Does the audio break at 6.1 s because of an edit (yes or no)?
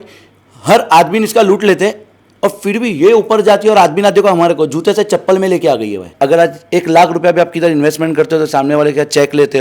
yes